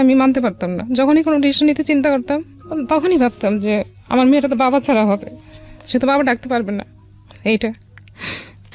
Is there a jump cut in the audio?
no; 0 cuts

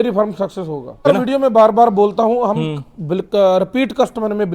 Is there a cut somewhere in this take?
yes; 1 cut; at 1.1 s

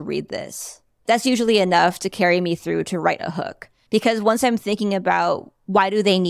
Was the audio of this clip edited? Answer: yes; 1 cut; at 1.0 s

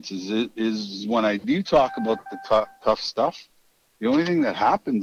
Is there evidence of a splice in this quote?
no; 0 cuts

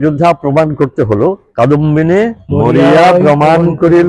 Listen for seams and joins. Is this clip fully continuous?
no; 2 cuts; at 1.4 s, 2.4 s

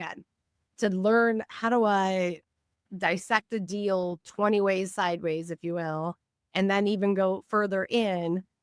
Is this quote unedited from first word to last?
yes; 0 cuts

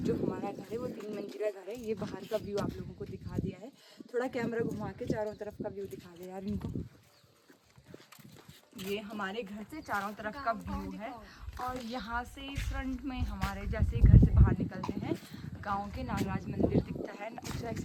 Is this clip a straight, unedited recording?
yes; 0 cuts

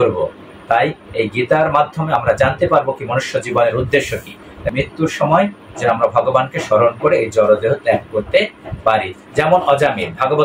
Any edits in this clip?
yes; 1 cut; at 4.6 s

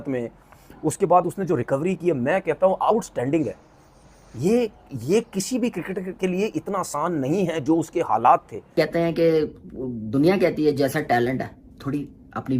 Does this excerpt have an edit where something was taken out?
yes; 1 cut; at 8.7 s

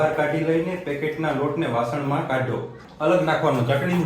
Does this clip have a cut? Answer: yes; 1 cut; at 2.7 s

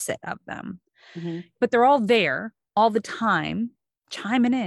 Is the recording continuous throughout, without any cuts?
no; 1 cut; at 1.6 s

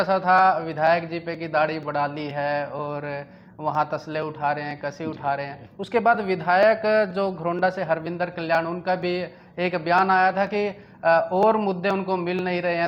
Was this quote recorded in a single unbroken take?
yes; 0 cuts

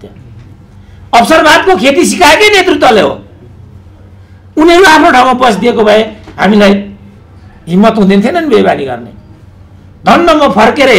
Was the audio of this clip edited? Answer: no; 0 cuts

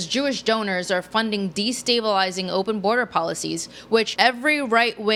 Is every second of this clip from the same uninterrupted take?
yes; 0 cuts

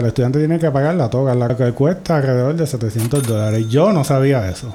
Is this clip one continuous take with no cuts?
yes; 0 cuts

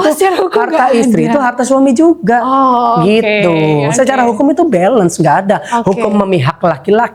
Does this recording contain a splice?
no; 0 cuts

